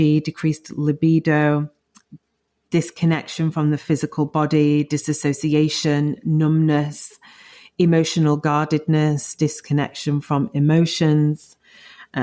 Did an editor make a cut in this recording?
no; 0 cuts

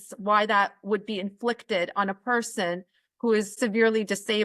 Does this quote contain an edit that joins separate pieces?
yes; 1 cut; at 3.5 s

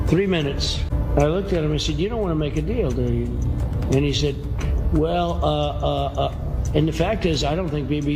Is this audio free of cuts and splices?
no; 1 cut; at 0.9 s

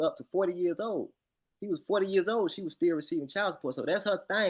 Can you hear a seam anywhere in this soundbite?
no; 0 cuts

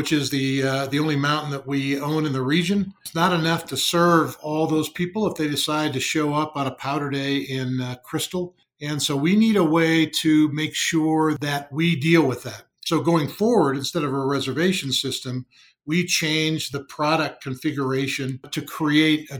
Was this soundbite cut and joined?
yes; 5 cuts; at 3.0 s, 8.7 s, 11.4 s, 16.7 s, 18.5 s

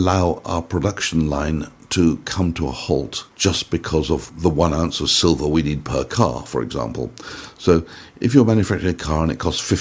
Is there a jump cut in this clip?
yes; 2 cuts; at 3.2 s, 4.3 s

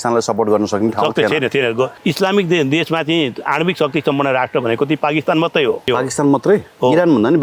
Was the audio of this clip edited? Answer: yes; 2 cuts; at 2.0 s, 5.9 s

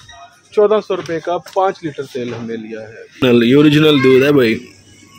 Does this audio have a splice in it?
yes; 1 cut; at 3.2 s

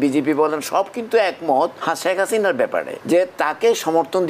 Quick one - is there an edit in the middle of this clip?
yes; 2 cuts; at 1.8 s, 2.9 s

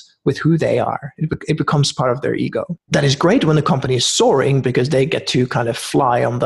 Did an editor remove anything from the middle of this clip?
yes; 1 cut; at 2.8 s

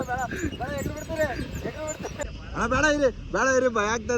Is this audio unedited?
no; 1 cut; at 2.1 s

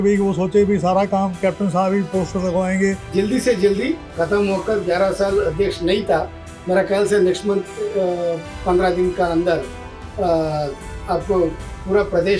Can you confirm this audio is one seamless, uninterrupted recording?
no; 1 cut; at 3.0 s

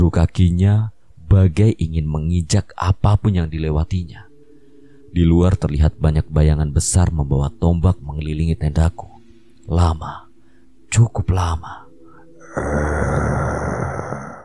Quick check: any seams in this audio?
no; 0 cuts

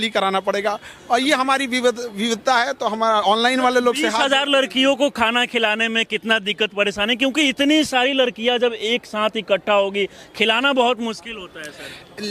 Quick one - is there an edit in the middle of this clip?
no; 0 cuts

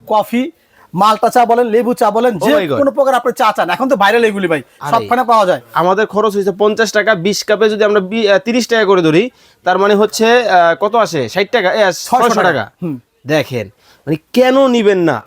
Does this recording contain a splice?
yes; 1 cut; at 5.7 s

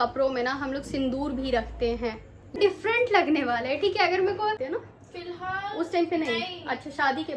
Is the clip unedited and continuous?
no; 2 cuts; at 2.6 s, 4.6 s

